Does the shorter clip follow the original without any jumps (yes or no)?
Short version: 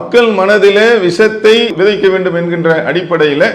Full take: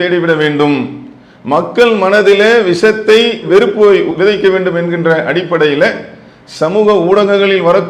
no